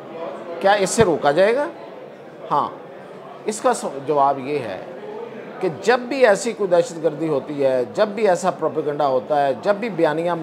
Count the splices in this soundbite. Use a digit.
0